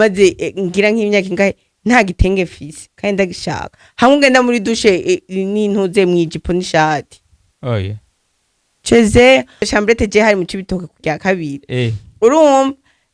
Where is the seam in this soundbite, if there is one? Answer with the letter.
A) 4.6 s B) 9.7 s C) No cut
B